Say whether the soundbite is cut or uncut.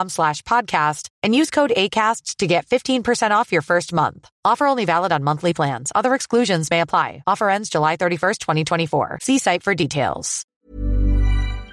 cut